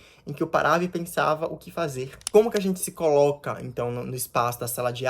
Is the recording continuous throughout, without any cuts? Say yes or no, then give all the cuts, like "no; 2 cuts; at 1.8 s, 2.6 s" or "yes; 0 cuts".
no; 1 cut; at 2.2 s